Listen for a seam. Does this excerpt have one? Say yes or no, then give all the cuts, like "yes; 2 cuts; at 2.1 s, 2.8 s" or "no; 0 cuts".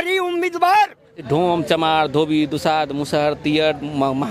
yes; 1 cut; at 1.3 s